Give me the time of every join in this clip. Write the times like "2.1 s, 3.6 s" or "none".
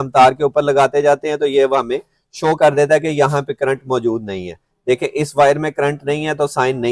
none